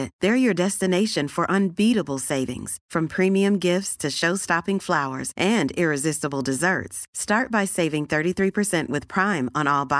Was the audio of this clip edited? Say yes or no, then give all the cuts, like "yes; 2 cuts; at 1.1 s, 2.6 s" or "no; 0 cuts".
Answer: no; 0 cuts